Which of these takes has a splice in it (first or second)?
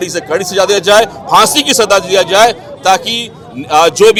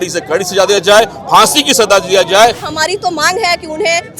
second